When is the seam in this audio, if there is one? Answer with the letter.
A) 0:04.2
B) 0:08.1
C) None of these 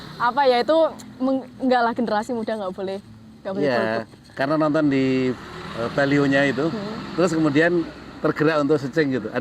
A